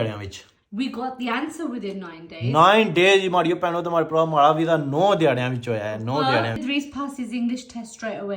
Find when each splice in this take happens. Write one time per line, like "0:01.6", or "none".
0:06.6